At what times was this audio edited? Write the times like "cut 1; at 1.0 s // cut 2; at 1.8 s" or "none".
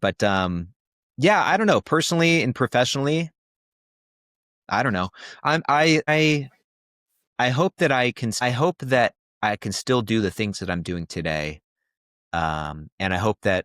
cut 1; at 6.1 s // cut 2; at 8.4 s